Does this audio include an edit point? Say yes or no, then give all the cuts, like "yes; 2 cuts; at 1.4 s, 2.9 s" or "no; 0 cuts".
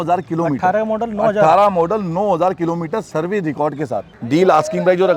yes; 1 cut; at 4.1 s